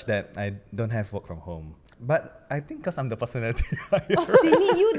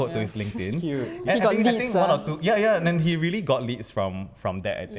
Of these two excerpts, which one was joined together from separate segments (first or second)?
second